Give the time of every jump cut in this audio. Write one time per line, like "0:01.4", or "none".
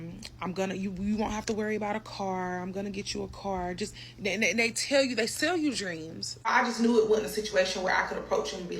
0:06.5